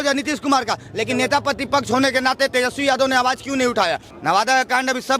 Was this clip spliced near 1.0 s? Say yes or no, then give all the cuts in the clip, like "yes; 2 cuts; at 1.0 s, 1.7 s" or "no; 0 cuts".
no; 1 cut; at 4.1 s